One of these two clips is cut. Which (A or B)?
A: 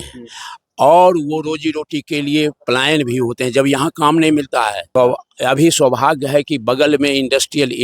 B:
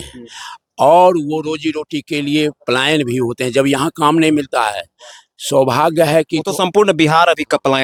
A